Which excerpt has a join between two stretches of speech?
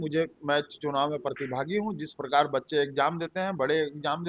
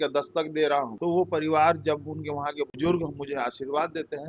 second; 2 cuts; at 0.9 s, 2.7 s

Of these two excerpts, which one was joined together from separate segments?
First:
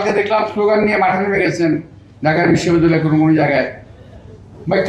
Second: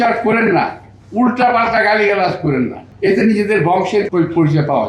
second; 2 cuts; at 2.8 s, 4.1 s

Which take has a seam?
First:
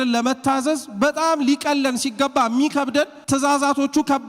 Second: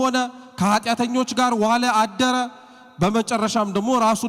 first; 1 cut; at 3.2 s

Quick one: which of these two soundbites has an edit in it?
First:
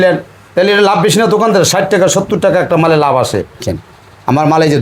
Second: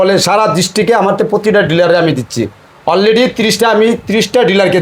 first; 1 cut; at 3.6 s

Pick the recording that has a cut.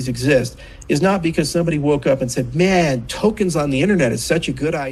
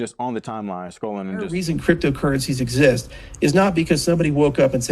second; 1 cut; at 1.6 s

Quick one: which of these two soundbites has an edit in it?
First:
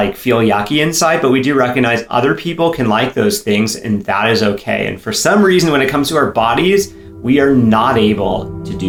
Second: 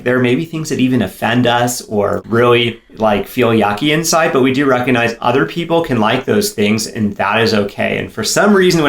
second; 1 cut; at 2.2 s

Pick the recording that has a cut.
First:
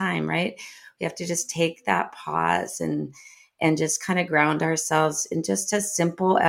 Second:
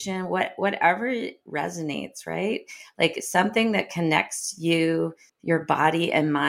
second; 1 cut; at 5.3 s

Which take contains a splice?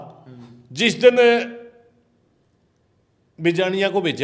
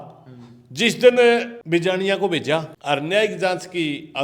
second; 2 cuts; at 1.6 s, 2.7 s

